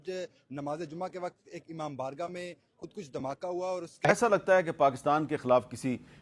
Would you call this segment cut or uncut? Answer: cut